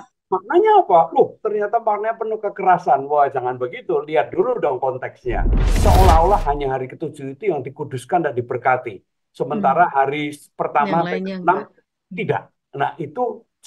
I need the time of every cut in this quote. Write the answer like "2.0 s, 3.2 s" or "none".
5.6 s